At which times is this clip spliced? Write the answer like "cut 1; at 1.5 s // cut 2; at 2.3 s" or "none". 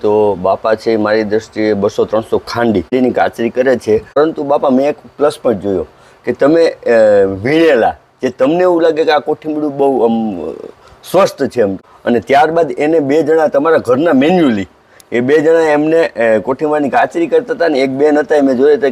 cut 1; at 2.9 s // cut 2; at 4.2 s // cut 3; at 11.8 s